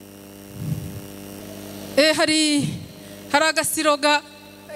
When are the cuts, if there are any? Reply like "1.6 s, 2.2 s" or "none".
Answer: 1.4 s